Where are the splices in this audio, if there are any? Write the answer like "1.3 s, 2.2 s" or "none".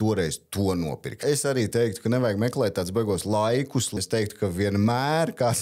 1.1 s, 3.9 s